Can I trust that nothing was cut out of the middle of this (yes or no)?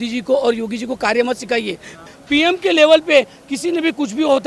no